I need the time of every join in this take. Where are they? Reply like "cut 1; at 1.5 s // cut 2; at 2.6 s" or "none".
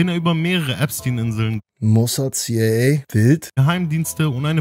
cut 1; at 1.7 s // cut 2; at 3.2 s